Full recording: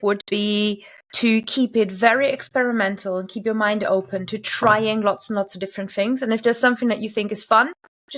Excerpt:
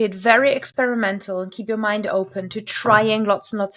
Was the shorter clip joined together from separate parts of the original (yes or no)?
no